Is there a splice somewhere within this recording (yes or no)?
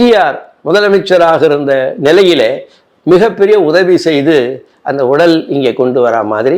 no